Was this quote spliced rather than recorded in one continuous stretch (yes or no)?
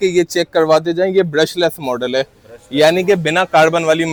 no